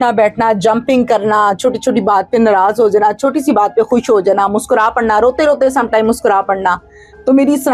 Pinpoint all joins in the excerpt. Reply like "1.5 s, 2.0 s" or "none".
none

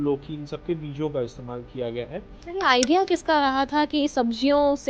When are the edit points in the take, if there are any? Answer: 2.3 s

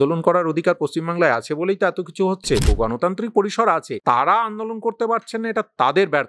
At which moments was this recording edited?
2.7 s, 3.9 s

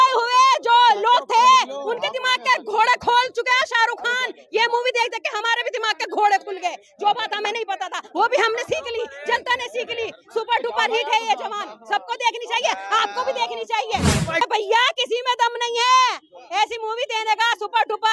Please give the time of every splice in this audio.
14.4 s

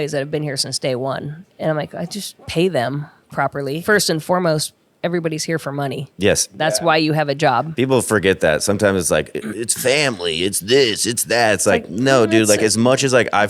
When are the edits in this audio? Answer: 1.4 s, 2.4 s, 3.8 s, 6.5 s

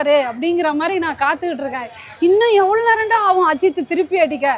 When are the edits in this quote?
none

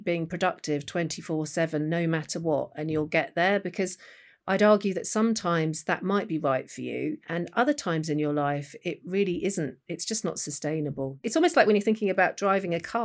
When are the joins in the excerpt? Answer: 7.2 s, 11.3 s

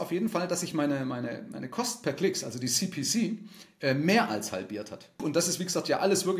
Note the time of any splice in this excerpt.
5.2 s

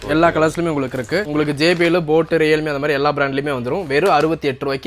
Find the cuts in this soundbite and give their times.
1.3 s

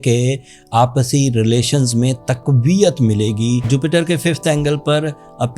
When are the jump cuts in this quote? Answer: 3.6 s

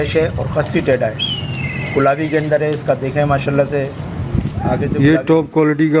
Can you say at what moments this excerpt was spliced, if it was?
4.9 s

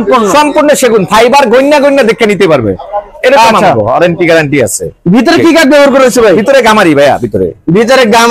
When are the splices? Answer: none

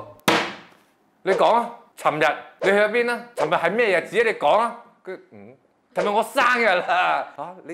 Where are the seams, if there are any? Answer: none

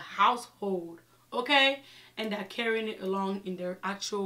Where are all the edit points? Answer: none

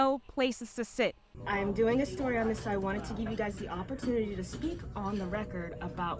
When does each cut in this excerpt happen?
1.3 s

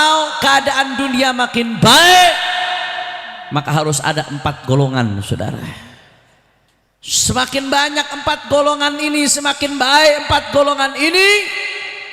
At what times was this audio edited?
none

